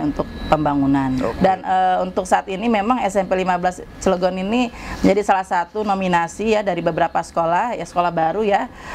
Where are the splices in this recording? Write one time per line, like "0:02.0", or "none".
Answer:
0:01.3